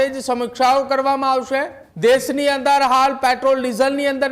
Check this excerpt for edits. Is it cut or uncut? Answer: cut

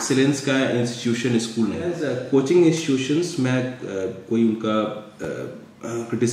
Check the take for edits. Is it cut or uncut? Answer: cut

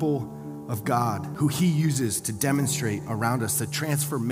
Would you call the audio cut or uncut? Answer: cut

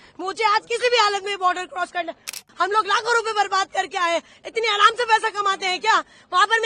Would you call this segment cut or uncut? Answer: cut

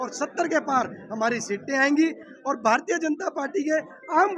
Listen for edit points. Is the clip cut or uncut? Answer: uncut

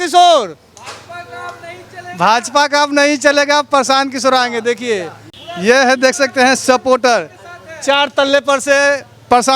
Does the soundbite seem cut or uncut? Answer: uncut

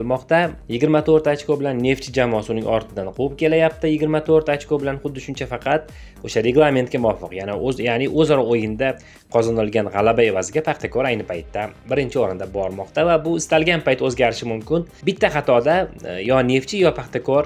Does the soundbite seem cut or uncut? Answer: uncut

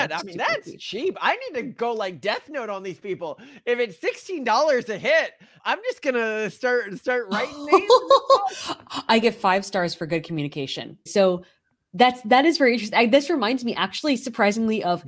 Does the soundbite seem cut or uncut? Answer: cut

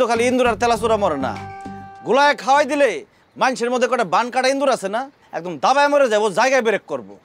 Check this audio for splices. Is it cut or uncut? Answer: uncut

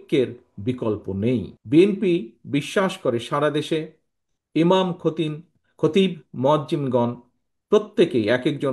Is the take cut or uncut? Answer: cut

